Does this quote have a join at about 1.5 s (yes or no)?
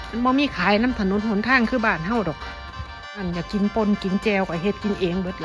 no